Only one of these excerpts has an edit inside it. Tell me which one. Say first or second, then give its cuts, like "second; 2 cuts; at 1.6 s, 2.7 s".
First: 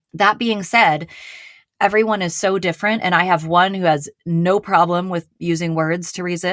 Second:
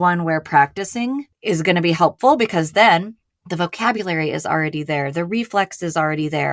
second; 1 cut; at 1.3 s